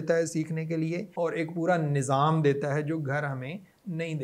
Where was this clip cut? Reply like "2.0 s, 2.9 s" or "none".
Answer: 1.1 s